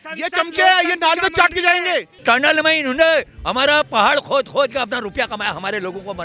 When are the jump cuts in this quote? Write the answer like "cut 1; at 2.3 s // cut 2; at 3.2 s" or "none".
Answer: cut 1; at 2.1 s